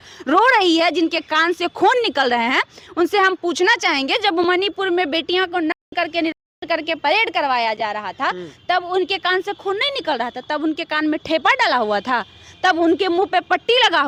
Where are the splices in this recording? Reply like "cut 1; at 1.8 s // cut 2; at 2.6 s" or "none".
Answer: none